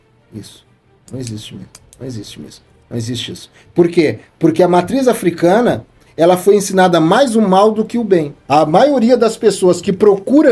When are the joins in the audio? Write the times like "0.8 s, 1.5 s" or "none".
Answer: 8.4 s